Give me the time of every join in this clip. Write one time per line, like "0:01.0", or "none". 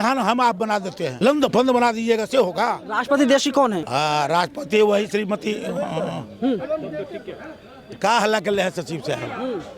0:01.0
0:02.9
0:03.8